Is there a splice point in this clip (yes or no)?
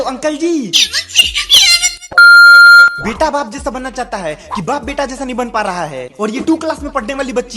yes